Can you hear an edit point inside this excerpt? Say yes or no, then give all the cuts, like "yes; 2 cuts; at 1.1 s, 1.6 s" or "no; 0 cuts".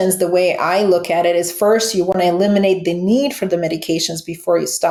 no; 0 cuts